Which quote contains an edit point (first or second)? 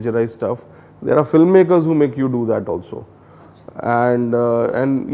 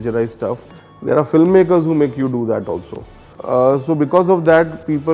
second